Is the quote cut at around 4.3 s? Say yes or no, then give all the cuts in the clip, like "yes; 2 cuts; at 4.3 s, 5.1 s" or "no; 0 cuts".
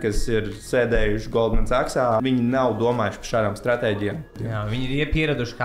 yes; 2 cuts; at 2.2 s, 4.3 s